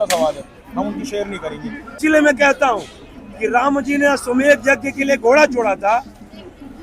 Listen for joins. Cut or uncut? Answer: cut